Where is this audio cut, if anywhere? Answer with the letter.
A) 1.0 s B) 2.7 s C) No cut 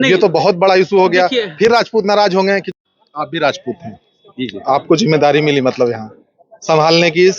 B